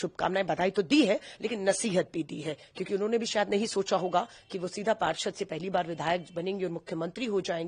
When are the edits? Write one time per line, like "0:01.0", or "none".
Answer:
none